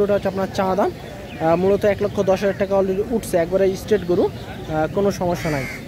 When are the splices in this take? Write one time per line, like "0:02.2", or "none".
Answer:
none